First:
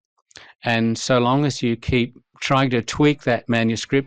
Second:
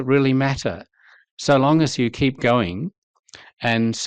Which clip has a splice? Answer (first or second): first